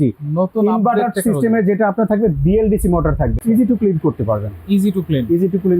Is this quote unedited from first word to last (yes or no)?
no